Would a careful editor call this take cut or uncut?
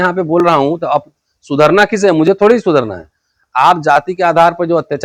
uncut